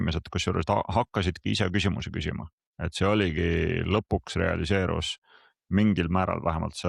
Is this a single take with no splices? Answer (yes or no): yes